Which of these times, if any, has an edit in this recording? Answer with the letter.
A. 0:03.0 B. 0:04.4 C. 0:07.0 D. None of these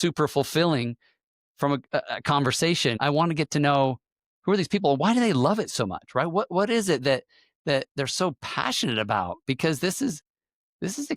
A